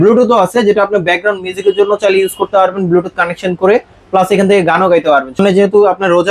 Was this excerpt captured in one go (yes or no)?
no